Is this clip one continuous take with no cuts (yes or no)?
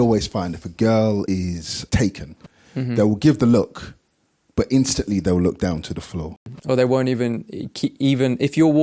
no